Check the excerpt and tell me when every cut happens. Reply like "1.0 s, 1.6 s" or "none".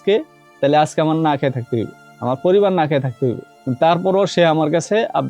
none